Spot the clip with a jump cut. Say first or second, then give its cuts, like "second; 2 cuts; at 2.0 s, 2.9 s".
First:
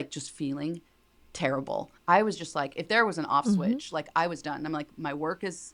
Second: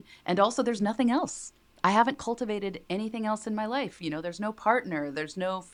first; 1 cut; at 1.9 s